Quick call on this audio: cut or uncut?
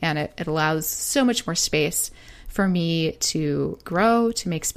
cut